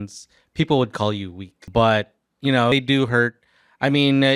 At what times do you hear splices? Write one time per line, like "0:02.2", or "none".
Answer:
0:01.6
0:02.7